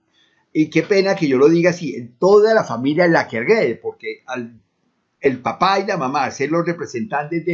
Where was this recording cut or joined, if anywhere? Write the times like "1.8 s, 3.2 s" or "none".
2.9 s